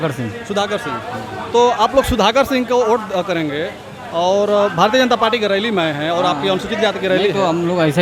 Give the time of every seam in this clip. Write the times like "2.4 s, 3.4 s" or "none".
none